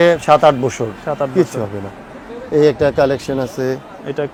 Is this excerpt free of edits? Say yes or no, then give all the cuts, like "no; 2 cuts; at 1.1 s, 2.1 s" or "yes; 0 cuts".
yes; 0 cuts